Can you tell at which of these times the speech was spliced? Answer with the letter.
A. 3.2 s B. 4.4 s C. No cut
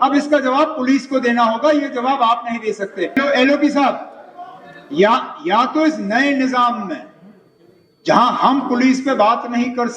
A